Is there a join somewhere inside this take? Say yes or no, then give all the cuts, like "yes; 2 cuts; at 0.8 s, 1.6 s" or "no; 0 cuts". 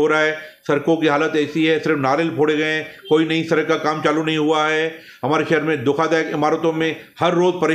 no; 0 cuts